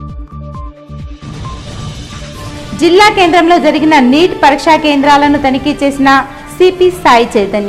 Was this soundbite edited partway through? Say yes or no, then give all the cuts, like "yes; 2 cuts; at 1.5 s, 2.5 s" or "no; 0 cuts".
yes; 1 cut; at 1.1 s